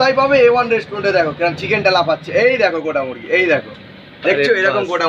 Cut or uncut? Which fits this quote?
uncut